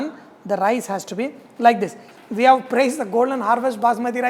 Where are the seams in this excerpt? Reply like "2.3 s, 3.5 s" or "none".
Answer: 2.0 s